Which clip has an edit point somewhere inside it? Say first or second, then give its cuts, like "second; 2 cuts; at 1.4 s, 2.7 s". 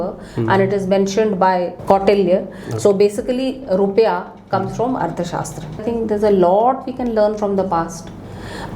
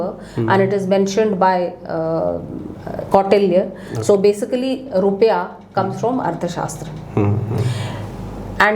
first; 2 cuts; at 1.8 s, 5.8 s